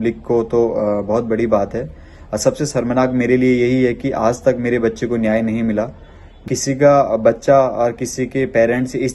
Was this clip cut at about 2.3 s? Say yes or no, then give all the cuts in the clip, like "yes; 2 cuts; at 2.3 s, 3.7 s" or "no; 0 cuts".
no; 1 cut; at 6.4 s